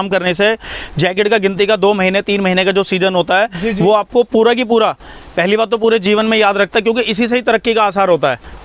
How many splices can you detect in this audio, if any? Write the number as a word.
zero